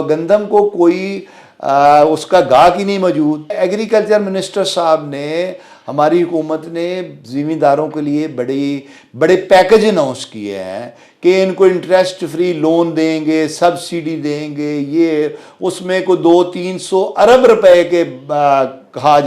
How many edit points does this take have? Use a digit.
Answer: 1